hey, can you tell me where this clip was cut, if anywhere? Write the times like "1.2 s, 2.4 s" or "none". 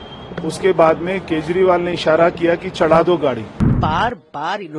3.7 s